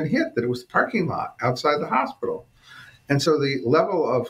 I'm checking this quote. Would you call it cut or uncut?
cut